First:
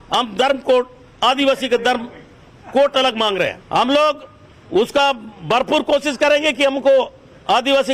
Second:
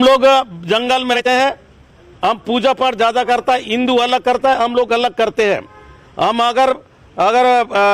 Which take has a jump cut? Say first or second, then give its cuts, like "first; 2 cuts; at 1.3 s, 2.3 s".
second; 1 cut; at 1.1 s